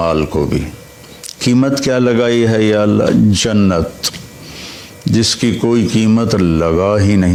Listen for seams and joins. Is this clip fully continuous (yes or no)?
yes